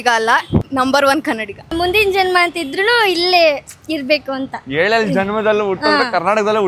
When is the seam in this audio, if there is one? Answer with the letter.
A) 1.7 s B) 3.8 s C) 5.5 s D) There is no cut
A